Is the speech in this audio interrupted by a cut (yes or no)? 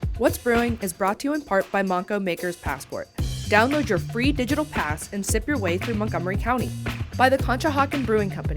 no